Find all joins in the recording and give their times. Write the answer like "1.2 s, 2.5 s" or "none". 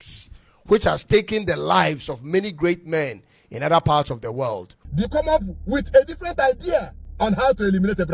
5.0 s, 7.0 s